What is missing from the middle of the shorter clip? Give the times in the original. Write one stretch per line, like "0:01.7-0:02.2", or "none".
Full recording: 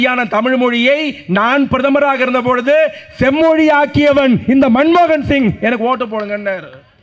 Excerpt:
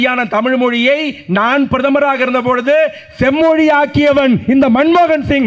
none